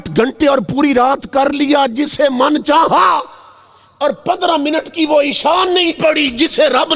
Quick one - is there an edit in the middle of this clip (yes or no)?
no